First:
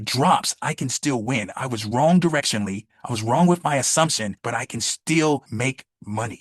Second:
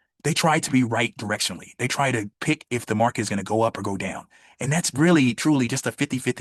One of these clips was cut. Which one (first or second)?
first